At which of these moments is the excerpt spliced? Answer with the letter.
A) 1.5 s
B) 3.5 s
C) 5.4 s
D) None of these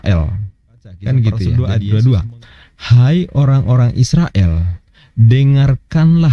A